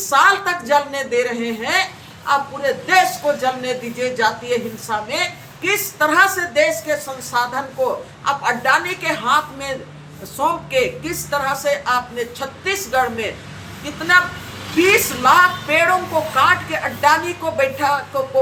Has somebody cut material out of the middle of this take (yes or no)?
no